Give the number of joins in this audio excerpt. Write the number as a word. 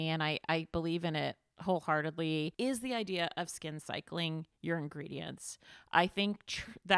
one